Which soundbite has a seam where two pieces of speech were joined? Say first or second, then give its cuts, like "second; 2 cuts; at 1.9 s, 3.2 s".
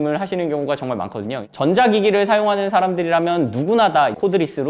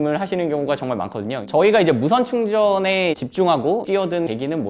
first; 1 cut; at 1.4 s